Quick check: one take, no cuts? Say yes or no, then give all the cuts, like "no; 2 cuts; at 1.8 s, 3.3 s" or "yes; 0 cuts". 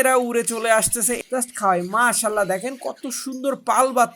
no; 1 cut; at 1.2 s